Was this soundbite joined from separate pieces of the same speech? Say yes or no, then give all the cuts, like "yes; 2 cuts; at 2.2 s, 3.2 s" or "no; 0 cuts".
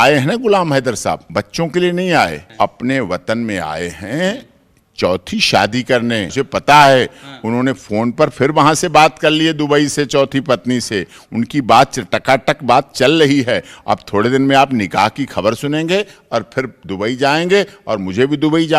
yes; 3 cuts; at 1.2 s, 2.4 s, 6.3 s